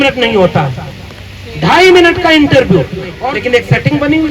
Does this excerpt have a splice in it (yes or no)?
yes